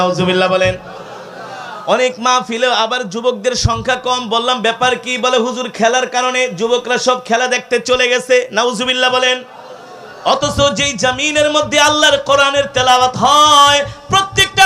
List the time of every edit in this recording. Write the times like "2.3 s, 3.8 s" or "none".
none

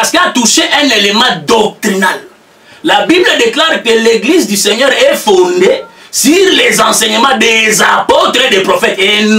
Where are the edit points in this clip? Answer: none

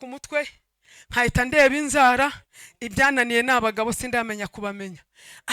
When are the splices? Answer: none

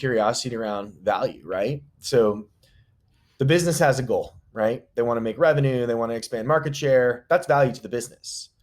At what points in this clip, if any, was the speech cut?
none

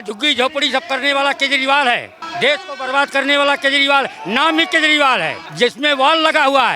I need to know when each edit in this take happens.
2.2 s, 5.4 s

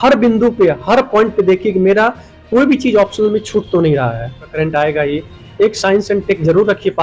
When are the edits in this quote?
4.5 s

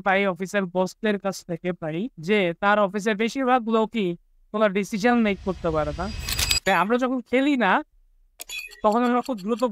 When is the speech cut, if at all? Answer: 2.2 s, 6.7 s

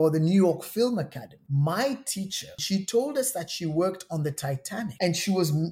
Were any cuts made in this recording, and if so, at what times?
1.4 s, 2.5 s, 4.9 s

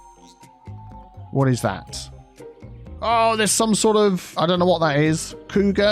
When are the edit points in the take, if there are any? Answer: 4.3 s

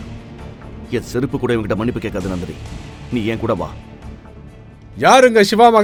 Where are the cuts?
none

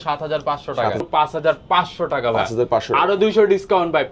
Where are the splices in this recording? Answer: 1.0 s

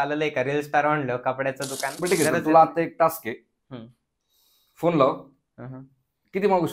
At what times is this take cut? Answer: 1.9 s

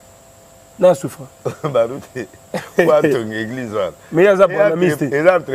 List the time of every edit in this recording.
none

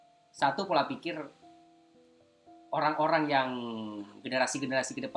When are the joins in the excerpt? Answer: none

